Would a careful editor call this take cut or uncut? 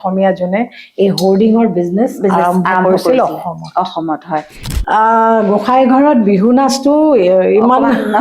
cut